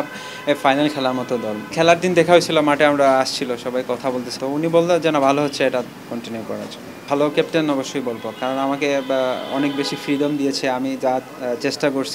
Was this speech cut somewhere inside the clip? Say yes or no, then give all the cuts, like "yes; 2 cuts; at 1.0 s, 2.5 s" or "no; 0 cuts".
yes; 3 cuts; at 1.6 s, 4.3 s, 7.0 s